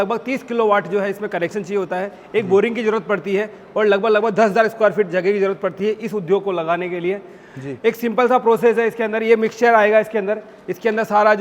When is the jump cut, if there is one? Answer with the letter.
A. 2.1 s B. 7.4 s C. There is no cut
C